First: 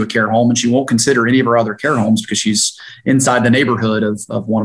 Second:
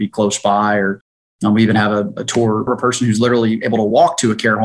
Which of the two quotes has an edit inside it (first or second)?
second